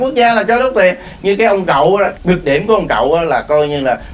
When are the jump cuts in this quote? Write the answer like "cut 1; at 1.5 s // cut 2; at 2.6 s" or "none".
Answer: cut 1; at 2.1 s